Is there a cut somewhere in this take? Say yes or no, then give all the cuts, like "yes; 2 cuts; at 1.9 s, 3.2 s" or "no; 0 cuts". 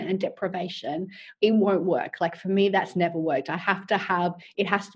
no; 0 cuts